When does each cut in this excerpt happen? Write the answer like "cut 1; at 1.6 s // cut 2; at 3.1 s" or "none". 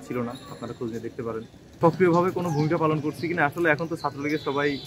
cut 1; at 1.8 s